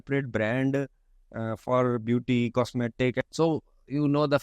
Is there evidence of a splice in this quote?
yes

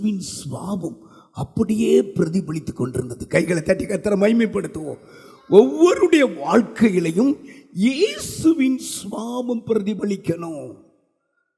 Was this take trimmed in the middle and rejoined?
no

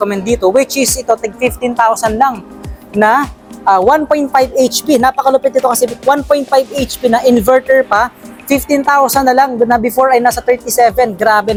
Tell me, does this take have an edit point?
no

